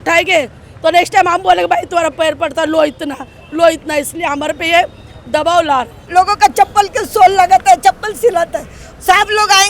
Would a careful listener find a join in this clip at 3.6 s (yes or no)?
no